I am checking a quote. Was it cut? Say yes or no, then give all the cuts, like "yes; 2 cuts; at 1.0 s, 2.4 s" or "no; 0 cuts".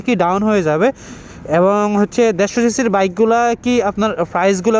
no; 0 cuts